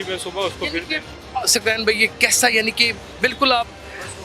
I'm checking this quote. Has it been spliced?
no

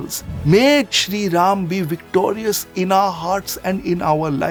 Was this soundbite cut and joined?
no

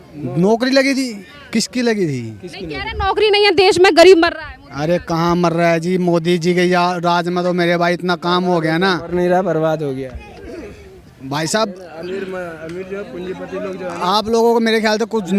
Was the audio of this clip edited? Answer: no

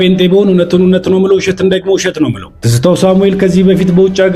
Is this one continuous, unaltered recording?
yes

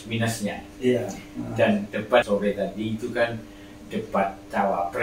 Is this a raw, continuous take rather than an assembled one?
no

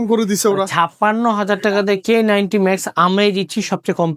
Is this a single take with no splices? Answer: yes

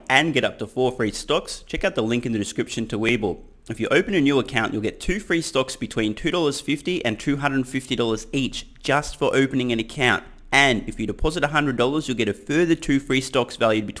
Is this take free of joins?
yes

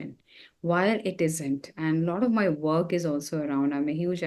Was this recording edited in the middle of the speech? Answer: no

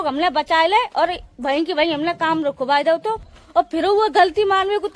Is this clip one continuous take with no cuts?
no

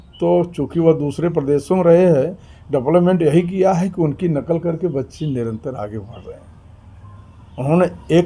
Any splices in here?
no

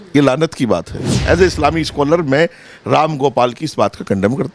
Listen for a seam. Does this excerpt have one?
yes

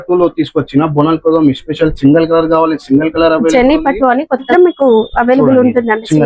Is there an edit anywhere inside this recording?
yes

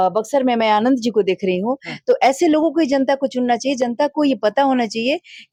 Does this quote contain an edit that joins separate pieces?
no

